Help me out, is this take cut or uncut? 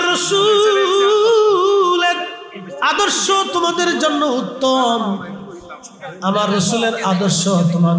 uncut